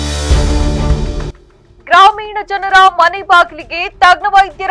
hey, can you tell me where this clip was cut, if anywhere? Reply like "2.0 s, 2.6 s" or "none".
1.3 s